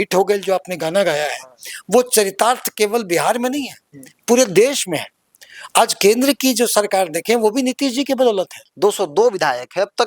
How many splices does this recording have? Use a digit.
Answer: 1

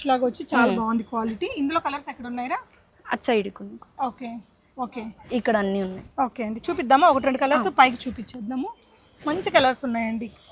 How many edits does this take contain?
0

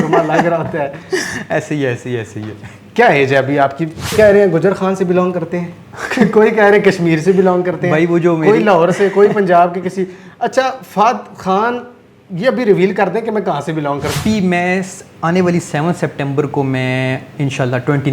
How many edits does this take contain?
2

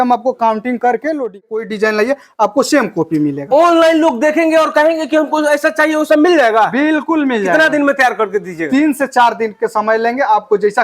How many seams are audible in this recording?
1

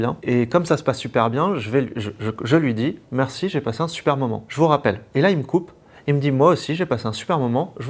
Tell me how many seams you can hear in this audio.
0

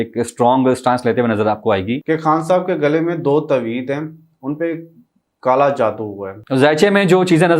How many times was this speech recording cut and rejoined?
2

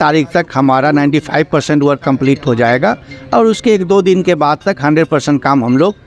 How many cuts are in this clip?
0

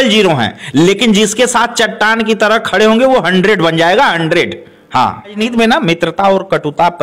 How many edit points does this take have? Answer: 1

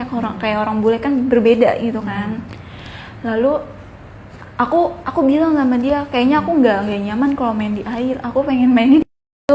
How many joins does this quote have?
0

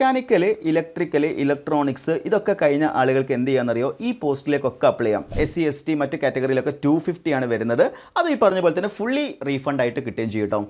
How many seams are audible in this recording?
1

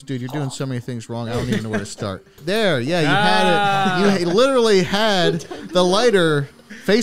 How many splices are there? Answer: 1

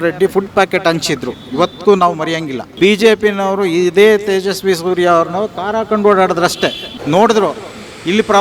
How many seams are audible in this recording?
2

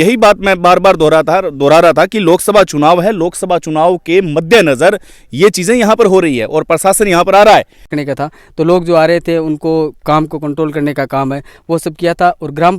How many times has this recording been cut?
1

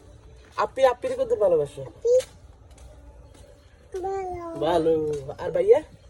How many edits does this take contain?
0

